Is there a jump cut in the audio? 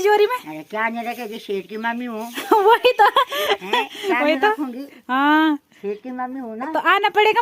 no; 0 cuts

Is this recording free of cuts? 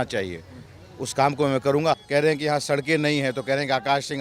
no; 1 cut; at 2.0 s

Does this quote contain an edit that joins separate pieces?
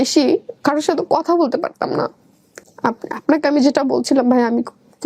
no; 0 cuts

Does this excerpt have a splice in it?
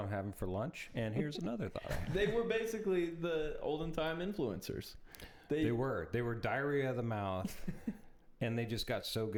no; 0 cuts

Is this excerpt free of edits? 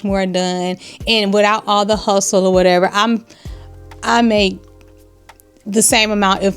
yes; 0 cuts

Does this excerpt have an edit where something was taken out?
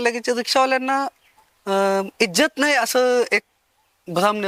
no; 0 cuts

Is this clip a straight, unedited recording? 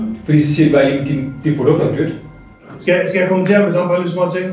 no; 1 cut; at 2.7 s

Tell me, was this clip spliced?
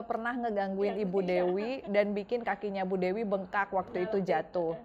no; 0 cuts

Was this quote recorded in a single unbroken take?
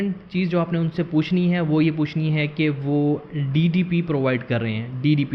yes; 0 cuts

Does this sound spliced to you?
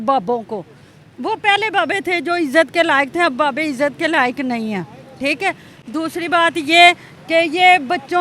no; 0 cuts

